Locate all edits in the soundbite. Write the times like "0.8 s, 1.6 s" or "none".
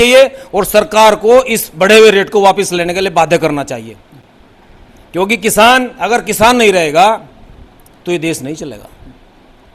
none